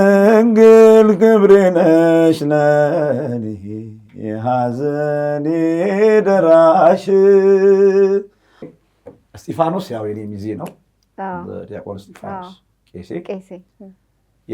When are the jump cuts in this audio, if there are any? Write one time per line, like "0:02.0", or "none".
0:08.8